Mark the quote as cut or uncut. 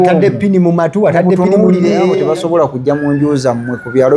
cut